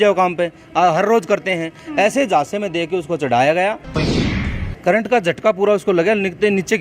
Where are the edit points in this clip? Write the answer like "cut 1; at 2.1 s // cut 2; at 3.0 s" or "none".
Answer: cut 1; at 4.1 s